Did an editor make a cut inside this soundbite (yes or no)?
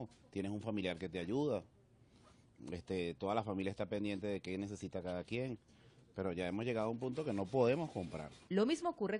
no